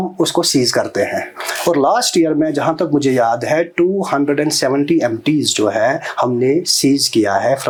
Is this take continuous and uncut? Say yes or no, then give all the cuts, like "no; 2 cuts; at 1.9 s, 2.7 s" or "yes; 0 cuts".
yes; 0 cuts